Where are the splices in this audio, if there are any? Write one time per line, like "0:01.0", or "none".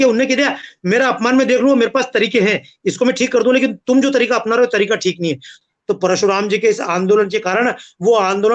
0:05.5